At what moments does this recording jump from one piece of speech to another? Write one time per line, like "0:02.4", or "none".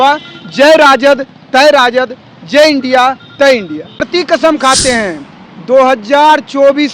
0:04.1